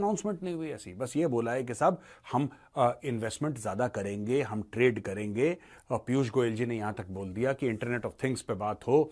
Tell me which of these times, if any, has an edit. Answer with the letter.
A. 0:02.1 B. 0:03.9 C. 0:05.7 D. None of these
D